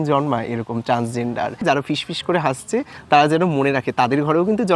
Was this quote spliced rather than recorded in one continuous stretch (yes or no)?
yes